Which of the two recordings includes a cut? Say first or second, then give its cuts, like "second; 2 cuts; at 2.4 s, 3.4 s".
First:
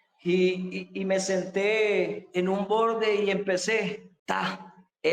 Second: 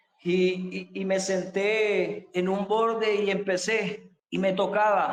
first; 1 cut; at 4.1 s